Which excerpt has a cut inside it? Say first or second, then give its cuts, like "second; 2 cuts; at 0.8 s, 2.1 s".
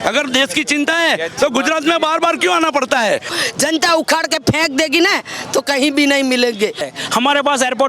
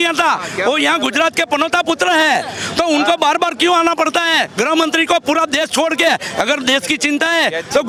first; 2 cuts; at 3.3 s, 6.9 s